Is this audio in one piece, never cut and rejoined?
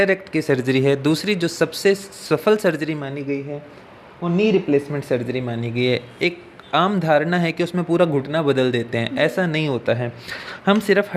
yes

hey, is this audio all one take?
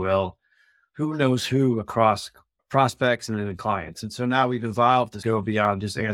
no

